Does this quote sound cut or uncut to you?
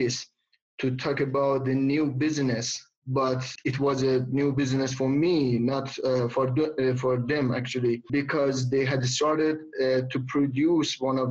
uncut